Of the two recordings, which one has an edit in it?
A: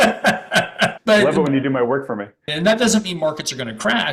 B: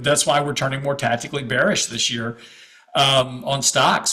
A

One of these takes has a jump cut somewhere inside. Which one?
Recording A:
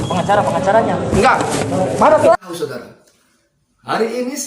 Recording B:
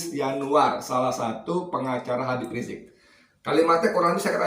A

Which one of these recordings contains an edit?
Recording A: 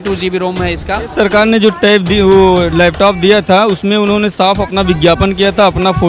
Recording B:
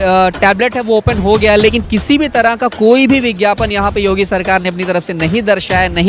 A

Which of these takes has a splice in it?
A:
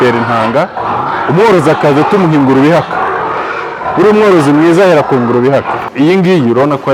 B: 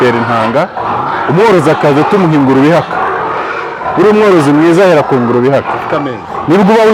A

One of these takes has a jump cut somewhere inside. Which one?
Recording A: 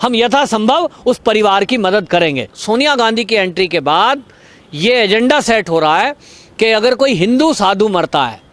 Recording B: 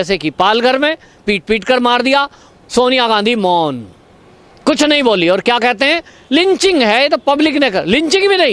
A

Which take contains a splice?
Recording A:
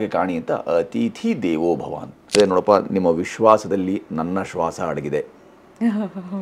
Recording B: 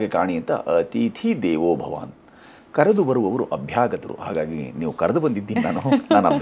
A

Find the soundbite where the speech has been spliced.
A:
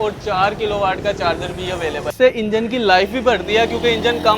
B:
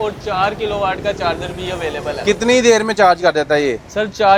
A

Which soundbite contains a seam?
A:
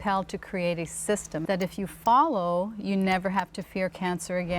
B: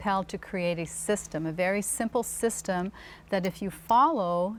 A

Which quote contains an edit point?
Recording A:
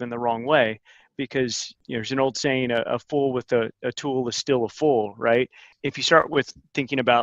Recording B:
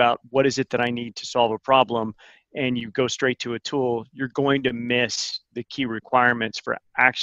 A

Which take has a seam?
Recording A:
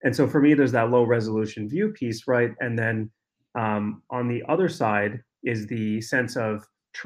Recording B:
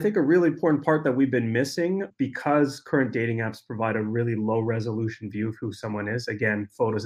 B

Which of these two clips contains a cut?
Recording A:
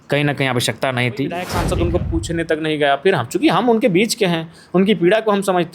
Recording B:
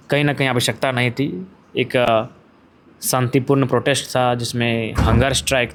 A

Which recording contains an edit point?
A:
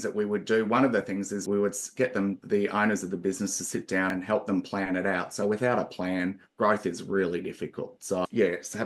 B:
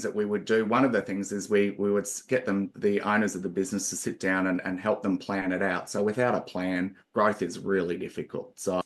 A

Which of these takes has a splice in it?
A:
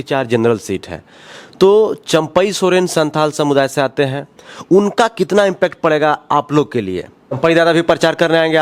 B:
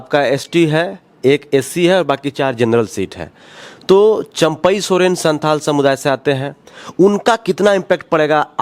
A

